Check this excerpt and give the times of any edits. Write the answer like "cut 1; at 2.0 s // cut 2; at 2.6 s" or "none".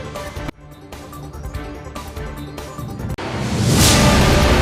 none